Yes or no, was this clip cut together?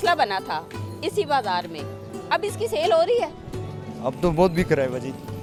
no